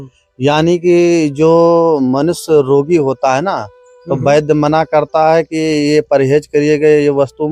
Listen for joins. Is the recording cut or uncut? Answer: uncut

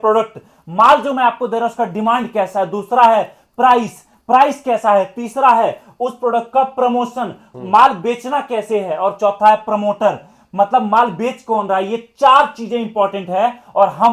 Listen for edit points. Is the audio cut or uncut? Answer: uncut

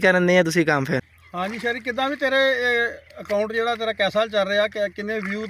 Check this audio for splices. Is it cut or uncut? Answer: cut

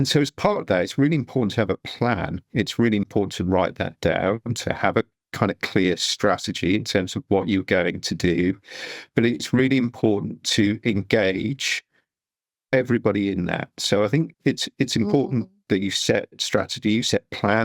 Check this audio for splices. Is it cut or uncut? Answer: cut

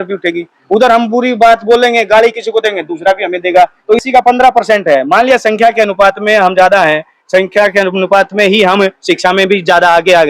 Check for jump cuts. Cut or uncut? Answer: cut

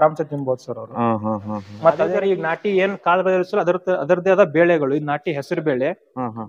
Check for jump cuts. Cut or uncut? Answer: cut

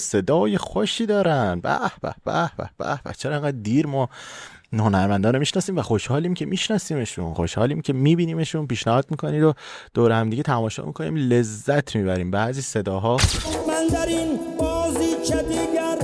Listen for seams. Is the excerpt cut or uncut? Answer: cut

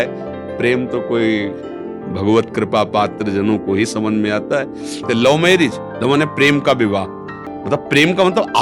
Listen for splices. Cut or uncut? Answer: cut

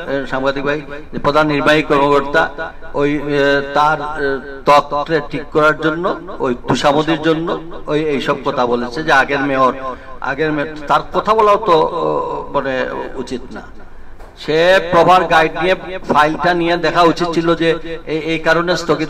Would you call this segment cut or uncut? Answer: uncut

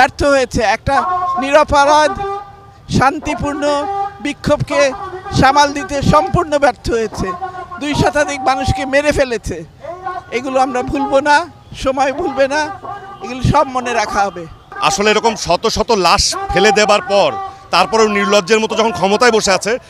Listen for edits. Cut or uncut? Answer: uncut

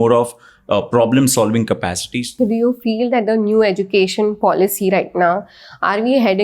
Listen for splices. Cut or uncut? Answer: cut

